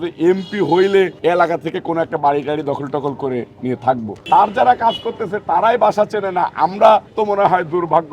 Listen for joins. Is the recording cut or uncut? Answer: cut